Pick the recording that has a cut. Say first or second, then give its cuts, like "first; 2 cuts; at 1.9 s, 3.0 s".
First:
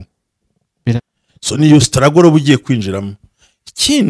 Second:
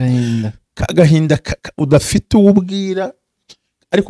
first; 1 cut; at 1.0 s